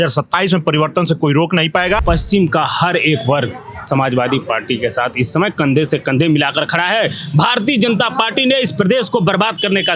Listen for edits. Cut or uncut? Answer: cut